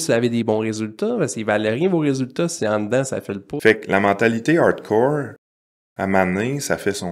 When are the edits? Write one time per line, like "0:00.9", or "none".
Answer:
0:03.5